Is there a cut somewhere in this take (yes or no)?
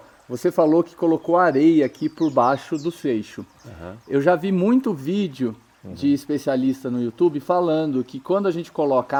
no